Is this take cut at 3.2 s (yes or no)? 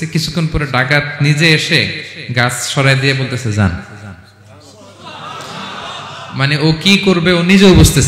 no